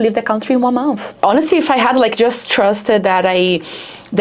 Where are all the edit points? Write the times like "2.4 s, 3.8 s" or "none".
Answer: 1.1 s